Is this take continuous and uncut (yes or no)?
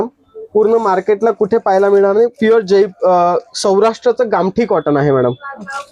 yes